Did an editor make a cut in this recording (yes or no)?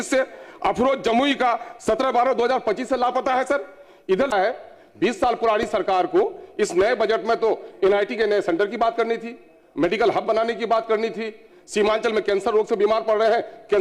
yes